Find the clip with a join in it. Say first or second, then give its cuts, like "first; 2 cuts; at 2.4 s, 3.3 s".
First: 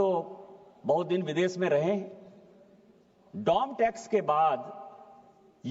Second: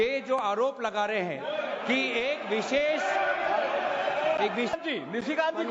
second; 1 cut; at 4.7 s